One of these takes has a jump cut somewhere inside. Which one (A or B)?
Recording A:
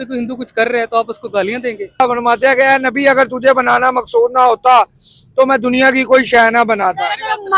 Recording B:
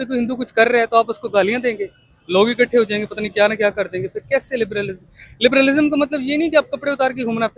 A